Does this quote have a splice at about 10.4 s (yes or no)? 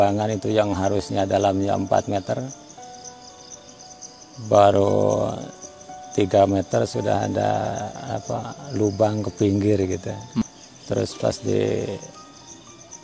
yes